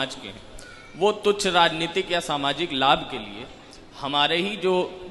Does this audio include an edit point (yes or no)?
no